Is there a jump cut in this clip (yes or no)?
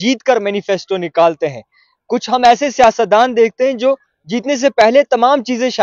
no